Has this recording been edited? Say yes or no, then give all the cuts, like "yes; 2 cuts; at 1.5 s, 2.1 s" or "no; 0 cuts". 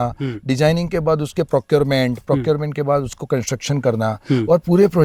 no; 0 cuts